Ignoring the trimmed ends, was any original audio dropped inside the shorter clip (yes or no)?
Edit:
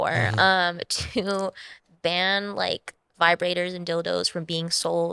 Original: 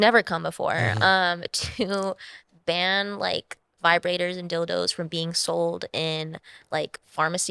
no